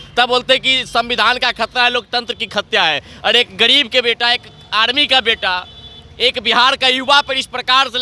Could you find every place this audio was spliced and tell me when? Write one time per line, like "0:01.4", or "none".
none